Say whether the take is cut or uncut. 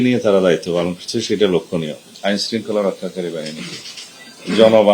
cut